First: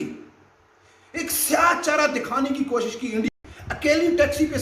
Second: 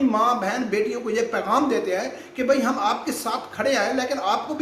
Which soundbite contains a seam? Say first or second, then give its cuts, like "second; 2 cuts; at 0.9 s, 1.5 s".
first; 1 cut; at 3.4 s